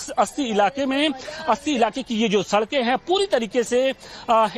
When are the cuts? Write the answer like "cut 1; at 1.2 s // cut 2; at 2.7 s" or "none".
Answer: cut 1; at 3.7 s